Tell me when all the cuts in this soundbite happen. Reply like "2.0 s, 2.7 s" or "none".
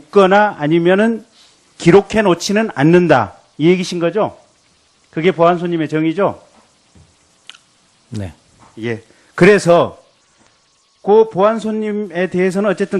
9.8 s